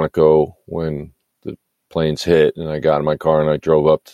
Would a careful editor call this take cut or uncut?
uncut